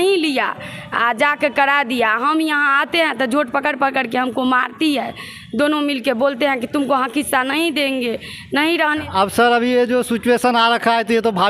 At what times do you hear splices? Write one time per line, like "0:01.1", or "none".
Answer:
0:09.0